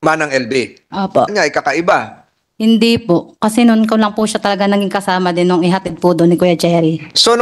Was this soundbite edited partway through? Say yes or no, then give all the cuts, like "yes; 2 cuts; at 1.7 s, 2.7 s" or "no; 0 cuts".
yes; 1 cut; at 1.3 s